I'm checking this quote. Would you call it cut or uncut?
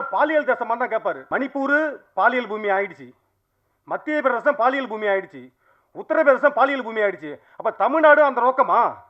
cut